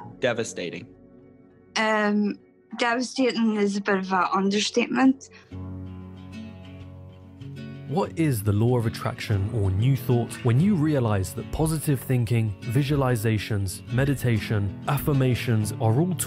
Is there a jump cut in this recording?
no; 0 cuts

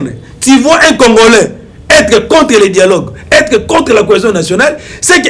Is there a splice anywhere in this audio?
no; 0 cuts

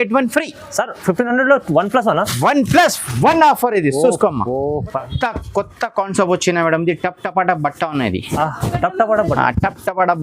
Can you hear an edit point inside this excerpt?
yes; 1 cut; at 5.0 s

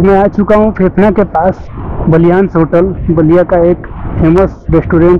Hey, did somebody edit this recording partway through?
no; 0 cuts

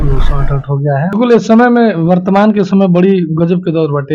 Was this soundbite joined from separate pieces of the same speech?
yes; 1 cut; at 1.1 s

